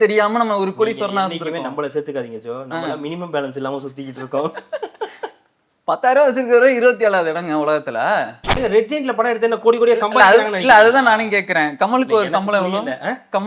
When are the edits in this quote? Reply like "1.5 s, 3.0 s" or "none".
8.6 s